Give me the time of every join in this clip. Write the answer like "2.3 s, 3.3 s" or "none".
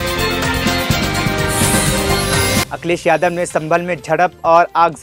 none